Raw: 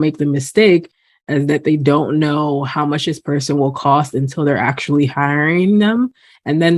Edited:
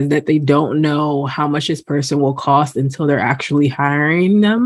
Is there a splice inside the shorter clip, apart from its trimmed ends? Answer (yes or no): no